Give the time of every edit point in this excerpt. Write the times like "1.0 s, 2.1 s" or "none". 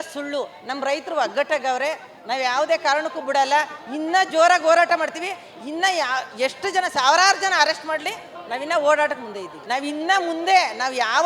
9.5 s